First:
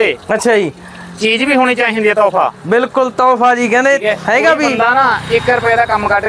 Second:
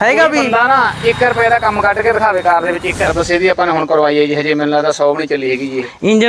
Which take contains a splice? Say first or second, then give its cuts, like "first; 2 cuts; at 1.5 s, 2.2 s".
second; 1 cut; at 3.1 s